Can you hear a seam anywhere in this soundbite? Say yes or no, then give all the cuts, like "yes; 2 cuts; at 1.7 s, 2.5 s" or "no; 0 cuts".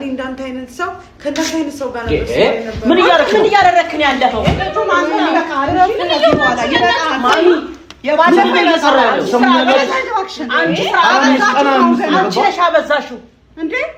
no; 0 cuts